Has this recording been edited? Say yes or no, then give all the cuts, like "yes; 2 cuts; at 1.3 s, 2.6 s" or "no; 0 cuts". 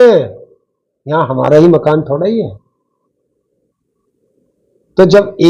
no; 0 cuts